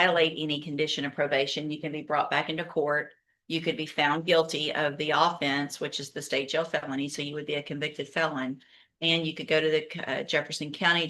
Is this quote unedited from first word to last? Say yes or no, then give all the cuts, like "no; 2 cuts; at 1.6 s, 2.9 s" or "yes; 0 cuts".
yes; 0 cuts